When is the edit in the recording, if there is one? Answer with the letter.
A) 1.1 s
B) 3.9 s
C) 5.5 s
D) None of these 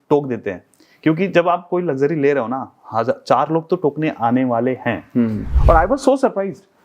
C